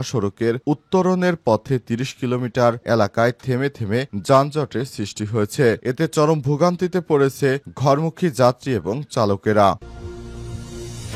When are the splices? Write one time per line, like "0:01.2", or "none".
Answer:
0:09.8

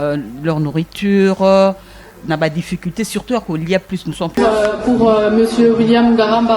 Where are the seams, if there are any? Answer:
0:04.4

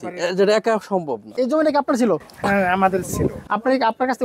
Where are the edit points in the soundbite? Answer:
0:01.3

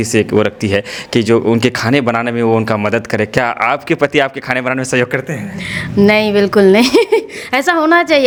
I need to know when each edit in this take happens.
none

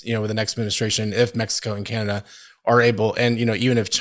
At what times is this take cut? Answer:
none

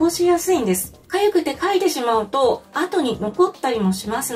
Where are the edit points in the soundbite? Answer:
0:00.9
0:02.7

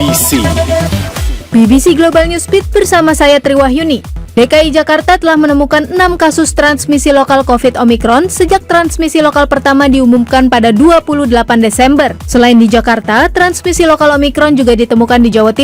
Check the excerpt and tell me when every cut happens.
0:04.2

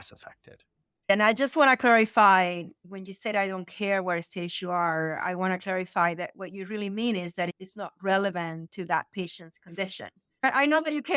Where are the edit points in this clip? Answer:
0:01.1

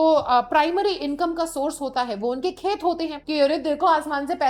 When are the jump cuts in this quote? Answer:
0:03.2

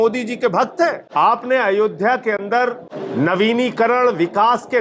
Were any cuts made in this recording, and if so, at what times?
0:01.0
0:02.9

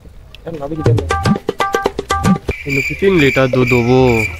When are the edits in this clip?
0:02.5

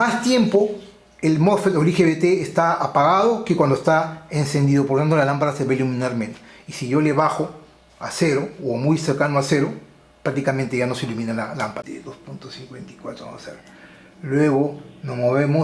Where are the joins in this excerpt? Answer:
0:11.9

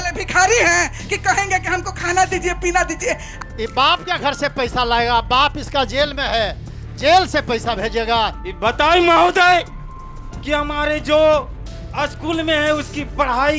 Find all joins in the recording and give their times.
0:03.3
0:08.4

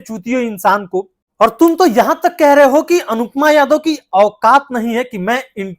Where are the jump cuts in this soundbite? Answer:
0:01.4

